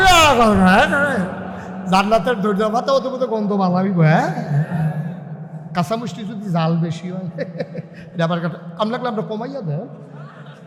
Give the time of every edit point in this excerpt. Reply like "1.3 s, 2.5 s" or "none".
none